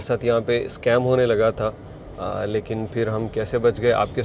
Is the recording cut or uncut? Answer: uncut